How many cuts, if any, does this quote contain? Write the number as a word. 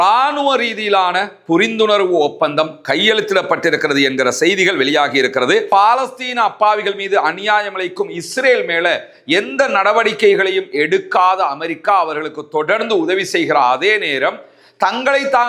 one